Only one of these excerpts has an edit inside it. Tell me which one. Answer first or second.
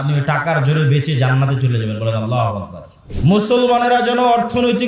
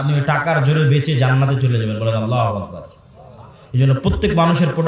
first